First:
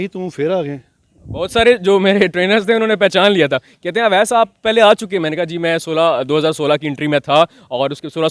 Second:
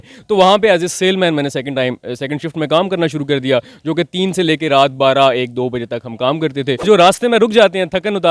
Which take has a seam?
second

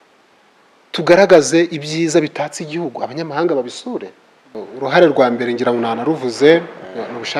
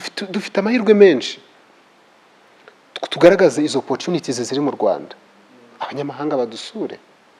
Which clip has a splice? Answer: first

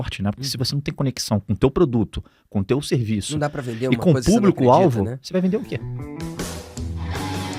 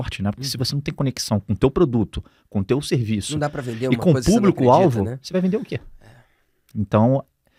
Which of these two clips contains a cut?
first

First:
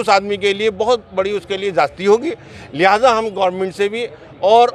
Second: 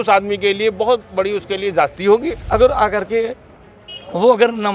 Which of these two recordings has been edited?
second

